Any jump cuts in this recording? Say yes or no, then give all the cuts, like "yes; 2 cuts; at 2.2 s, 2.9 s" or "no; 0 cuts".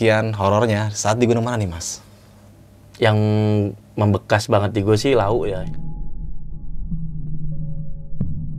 no; 0 cuts